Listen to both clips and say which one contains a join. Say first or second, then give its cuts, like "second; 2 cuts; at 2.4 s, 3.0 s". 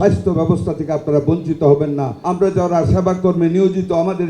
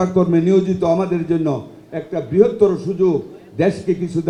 first; 1 cut; at 2.1 s